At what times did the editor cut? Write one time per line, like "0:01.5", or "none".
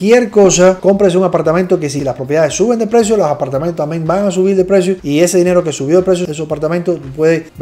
0:00.8
0:01.9
0:05.0